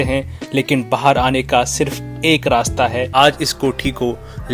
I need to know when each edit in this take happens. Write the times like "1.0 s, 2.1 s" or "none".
3.1 s